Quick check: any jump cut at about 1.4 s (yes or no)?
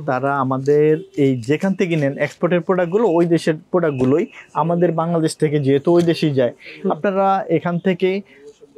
no